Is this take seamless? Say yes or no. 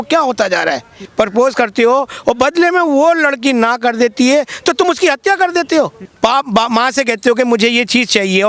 no